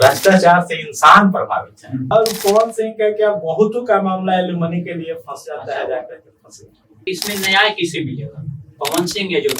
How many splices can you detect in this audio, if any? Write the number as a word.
two